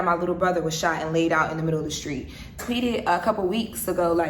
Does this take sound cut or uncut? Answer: cut